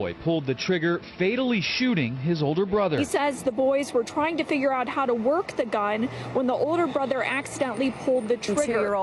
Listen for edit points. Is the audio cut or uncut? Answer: cut